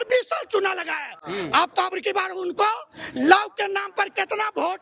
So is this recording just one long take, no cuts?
yes; 0 cuts

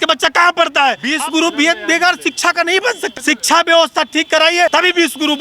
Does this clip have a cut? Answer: yes; 3 cuts; at 1.1 s, 3.1 s, 4.7 s

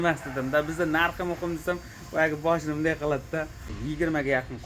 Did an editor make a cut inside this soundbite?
yes; 1 cut; at 3.8 s

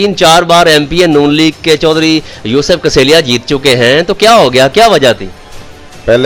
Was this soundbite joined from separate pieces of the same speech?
no; 0 cuts

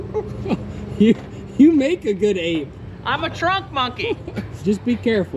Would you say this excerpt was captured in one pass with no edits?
yes; 0 cuts

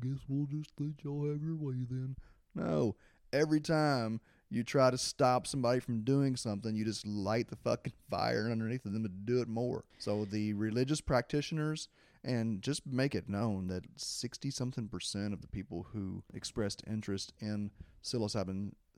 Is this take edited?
yes; 2 cuts; at 9.9 s, 16.3 s

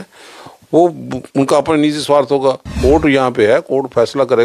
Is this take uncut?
no; 1 cut; at 2.7 s

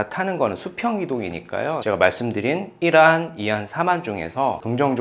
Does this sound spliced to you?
yes; 1 cut; at 1.8 s

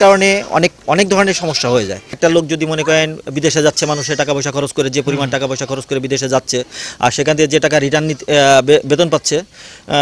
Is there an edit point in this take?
yes; 1 cut; at 2.2 s

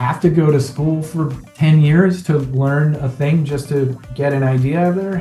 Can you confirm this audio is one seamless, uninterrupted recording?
yes; 0 cuts

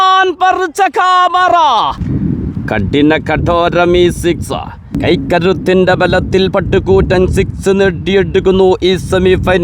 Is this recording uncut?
no; 2 cuts; at 2.0 s, 4.8 s

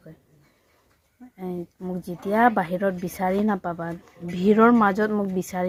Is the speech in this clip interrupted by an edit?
no; 0 cuts

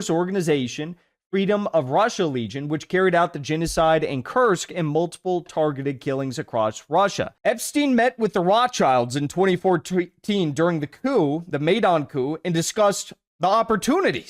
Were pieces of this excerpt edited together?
yes; 1 cut; at 7.3 s

